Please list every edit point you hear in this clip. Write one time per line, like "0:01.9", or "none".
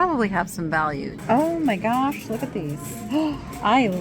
0:01.2